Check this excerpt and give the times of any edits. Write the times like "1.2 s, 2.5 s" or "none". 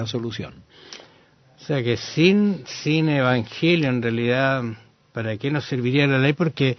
2.1 s